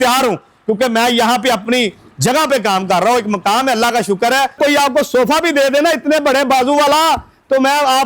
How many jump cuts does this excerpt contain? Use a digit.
1